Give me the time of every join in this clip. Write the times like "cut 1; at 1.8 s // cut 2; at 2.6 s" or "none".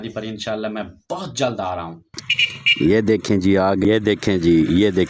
cut 1; at 2.1 s // cut 2; at 3.8 s